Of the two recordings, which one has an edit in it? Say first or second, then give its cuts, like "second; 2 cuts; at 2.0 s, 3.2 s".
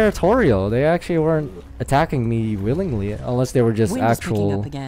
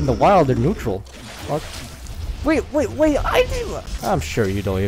second; 1 cut; at 3.9 s